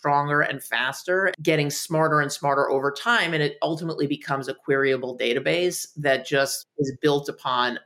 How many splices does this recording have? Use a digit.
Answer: 1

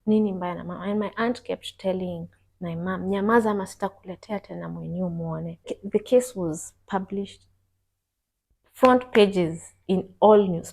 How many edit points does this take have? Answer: 1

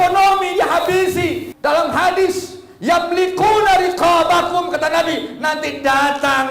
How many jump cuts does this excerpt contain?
1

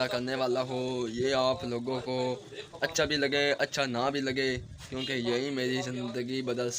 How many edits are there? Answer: 0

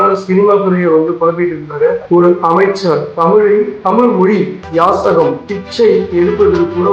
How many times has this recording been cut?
1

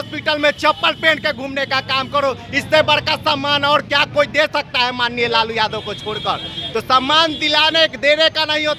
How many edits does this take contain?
0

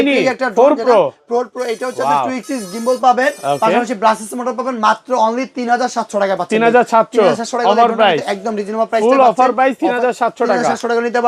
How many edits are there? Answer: 0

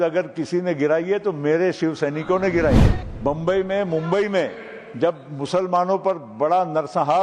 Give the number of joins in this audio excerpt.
1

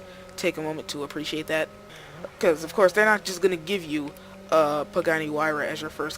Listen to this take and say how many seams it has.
1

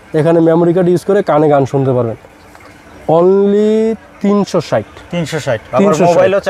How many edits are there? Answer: 0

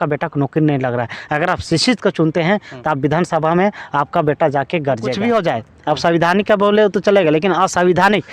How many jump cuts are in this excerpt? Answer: 1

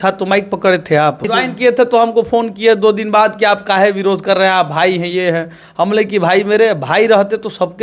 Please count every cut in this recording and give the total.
1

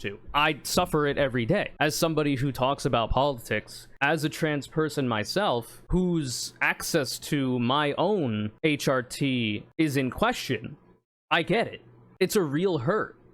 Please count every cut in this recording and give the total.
1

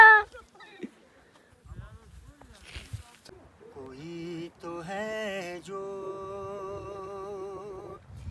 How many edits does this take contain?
1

